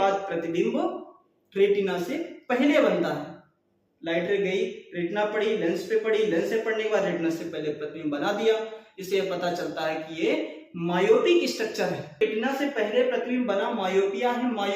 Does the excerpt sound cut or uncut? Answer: cut